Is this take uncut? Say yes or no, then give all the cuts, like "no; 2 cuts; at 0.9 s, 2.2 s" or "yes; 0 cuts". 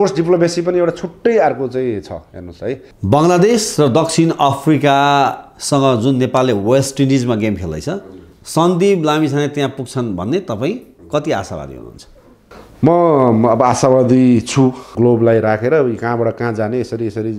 no; 2 cuts; at 2.9 s, 14.9 s